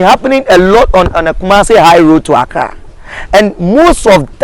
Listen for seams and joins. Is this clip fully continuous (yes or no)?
yes